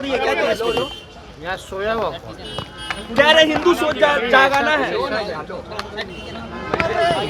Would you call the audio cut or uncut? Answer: uncut